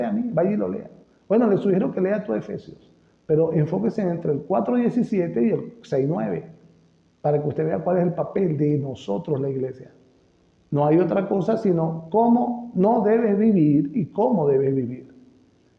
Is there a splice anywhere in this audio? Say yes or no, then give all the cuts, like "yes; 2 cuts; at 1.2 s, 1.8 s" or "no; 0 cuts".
no; 0 cuts